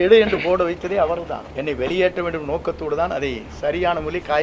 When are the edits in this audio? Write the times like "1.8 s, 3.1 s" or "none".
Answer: 1.4 s